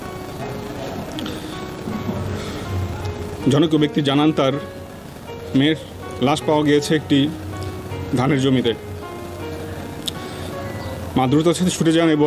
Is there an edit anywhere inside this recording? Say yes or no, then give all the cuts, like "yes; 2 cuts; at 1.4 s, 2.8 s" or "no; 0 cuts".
no; 0 cuts